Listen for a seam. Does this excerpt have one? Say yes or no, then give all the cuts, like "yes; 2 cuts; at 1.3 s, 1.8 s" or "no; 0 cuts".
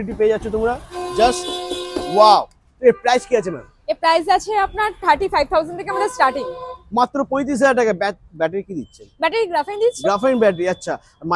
no; 0 cuts